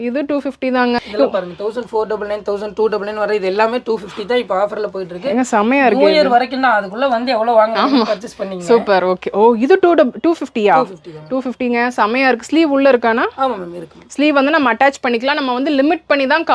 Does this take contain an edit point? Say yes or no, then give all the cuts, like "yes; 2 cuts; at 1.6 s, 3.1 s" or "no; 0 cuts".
yes; 1 cut; at 1.0 s